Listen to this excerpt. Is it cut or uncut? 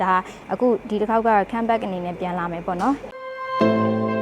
cut